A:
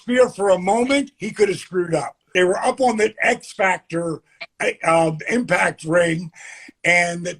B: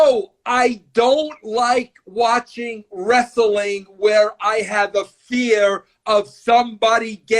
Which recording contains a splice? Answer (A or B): A